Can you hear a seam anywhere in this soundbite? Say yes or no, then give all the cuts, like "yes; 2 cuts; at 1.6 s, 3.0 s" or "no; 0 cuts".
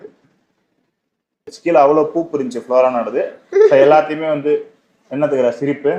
yes; 1 cut; at 1.6 s